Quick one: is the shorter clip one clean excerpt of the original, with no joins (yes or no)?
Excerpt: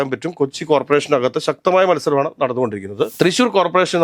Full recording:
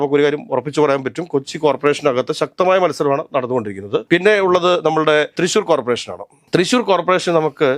no